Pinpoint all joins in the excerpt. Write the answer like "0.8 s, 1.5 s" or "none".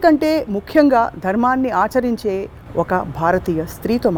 none